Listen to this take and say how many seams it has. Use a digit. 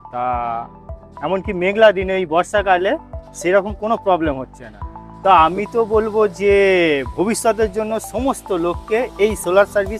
1